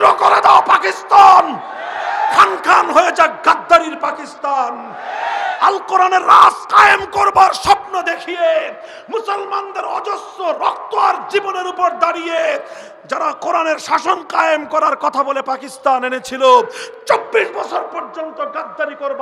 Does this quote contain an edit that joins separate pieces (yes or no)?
no